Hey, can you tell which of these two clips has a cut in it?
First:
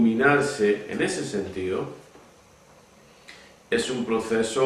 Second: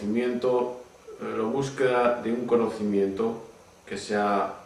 second; 1 cut; at 1.5 s

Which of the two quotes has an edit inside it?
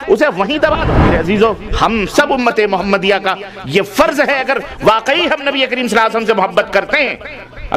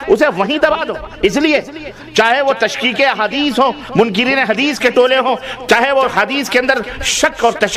first; 1 cut; at 1.1 s

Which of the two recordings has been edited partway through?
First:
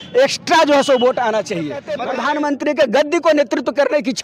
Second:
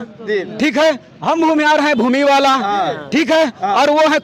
first; 1 cut; at 1.9 s

